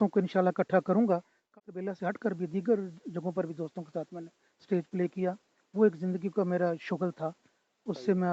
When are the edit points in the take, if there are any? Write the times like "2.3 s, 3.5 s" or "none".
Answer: 1.4 s